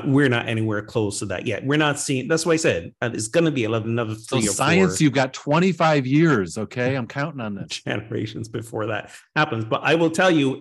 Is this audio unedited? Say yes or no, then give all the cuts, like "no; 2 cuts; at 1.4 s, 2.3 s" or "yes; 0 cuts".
no; 1 cut; at 4.5 s